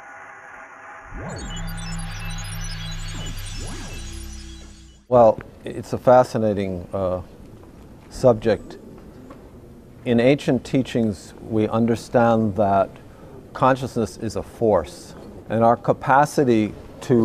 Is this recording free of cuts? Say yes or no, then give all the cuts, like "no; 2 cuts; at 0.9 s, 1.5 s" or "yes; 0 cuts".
yes; 0 cuts